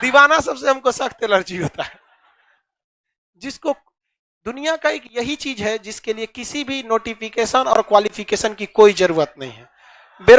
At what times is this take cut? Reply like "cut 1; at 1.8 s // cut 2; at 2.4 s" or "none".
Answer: none